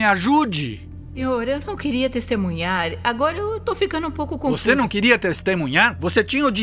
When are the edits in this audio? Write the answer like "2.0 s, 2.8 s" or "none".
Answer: 1.2 s